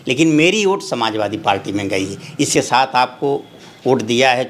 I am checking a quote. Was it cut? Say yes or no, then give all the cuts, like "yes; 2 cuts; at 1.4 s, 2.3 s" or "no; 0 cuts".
yes; 1 cut; at 2.5 s